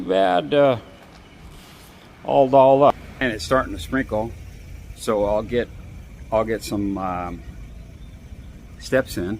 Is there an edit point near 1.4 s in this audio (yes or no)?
no